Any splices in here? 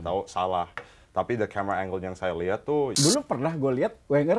yes; 1 cut; at 2.9 s

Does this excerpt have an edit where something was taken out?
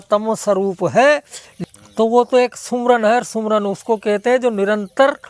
yes; 1 cut; at 1.6 s

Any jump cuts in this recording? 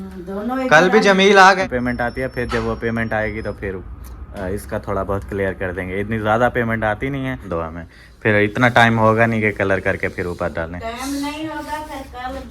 yes; 2 cuts; at 1.6 s, 7.5 s

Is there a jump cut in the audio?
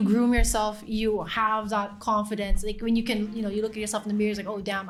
no; 0 cuts

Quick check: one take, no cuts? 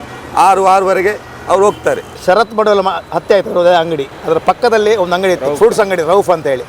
no; 1 cut; at 2.1 s

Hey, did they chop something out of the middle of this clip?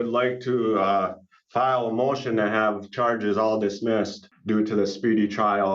yes; 1 cut; at 4.3 s

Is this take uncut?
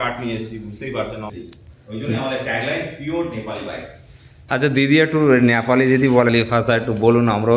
no; 2 cuts; at 1.3 s, 6.3 s

